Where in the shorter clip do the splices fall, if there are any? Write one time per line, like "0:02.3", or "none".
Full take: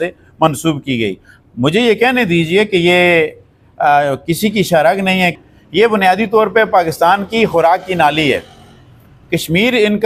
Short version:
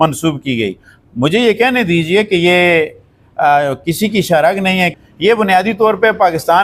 0:05.0